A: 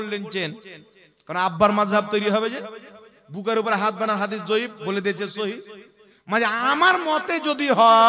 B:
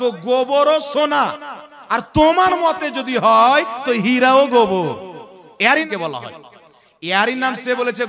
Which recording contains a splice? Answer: B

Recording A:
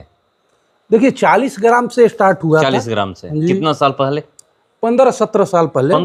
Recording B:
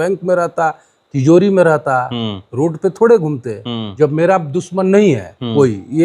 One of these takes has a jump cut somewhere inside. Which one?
B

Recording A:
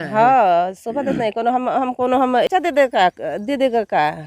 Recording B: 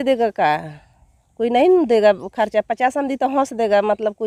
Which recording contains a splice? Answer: A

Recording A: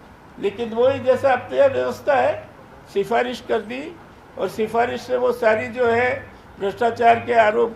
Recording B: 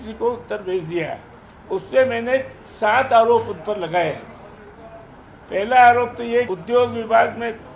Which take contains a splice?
B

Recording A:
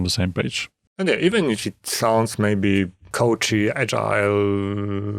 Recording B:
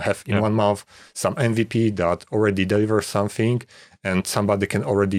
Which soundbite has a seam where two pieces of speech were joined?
A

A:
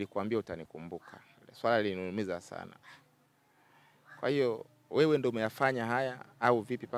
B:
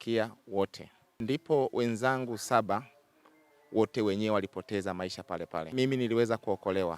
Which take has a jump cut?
B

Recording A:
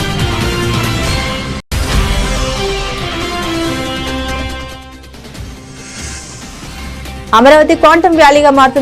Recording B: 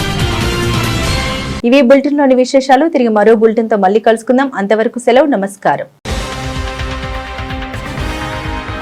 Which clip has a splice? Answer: A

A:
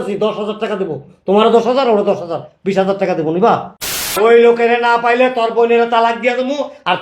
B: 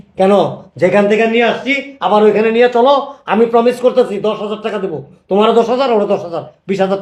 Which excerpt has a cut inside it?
A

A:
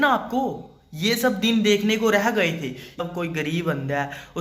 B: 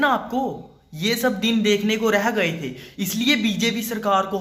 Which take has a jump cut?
A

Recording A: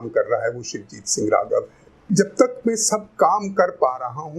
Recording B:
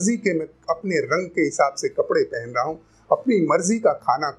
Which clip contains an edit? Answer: A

